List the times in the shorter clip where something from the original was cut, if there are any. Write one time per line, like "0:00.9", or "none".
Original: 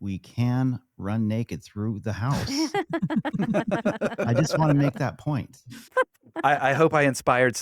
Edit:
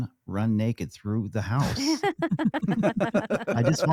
none